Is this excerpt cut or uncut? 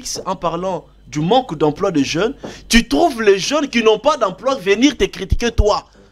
uncut